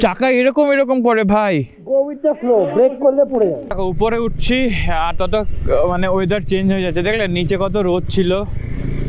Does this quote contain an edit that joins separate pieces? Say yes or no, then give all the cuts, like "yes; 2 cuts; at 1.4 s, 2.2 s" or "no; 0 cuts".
yes; 1 cut; at 3.7 s